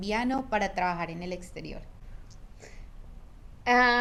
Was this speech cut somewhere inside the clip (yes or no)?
no